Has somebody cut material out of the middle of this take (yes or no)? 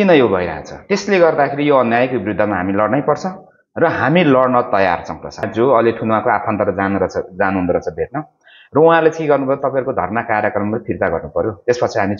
yes